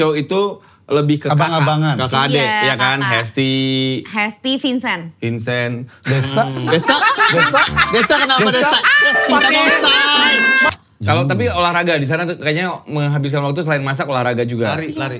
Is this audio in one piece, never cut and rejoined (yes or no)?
no